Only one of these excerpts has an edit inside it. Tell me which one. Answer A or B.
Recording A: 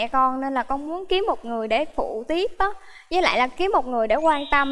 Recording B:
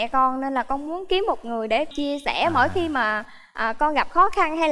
B